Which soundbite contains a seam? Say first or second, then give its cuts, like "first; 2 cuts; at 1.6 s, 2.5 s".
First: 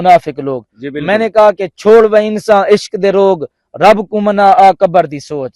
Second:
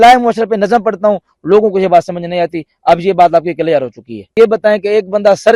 second; 1 cut; at 4.3 s